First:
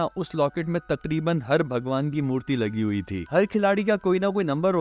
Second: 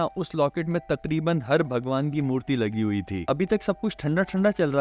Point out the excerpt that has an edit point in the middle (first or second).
second